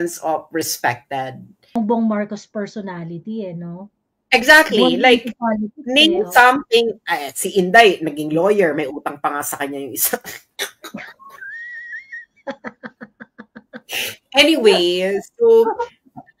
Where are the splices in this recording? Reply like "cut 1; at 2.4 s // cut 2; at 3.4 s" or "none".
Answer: cut 1; at 1.8 s